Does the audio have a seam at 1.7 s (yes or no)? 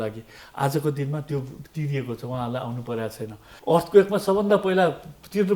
no